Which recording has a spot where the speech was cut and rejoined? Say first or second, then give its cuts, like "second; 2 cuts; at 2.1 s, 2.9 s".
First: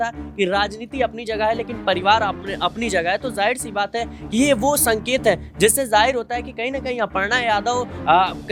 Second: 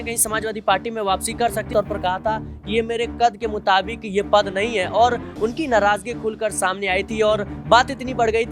second; 1 cut; at 1.7 s